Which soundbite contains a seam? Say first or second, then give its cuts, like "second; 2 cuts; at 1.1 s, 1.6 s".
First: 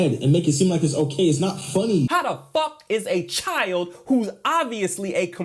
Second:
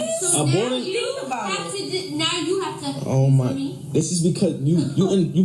first; 1 cut; at 2.1 s